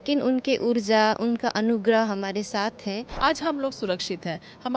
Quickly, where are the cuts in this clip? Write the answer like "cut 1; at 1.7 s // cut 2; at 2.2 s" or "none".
cut 1; at 3.1 s